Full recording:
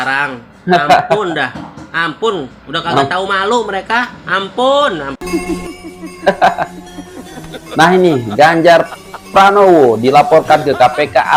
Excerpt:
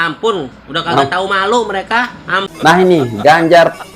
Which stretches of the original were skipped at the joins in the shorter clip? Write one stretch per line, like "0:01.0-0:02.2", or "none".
0:04.4-0:07.5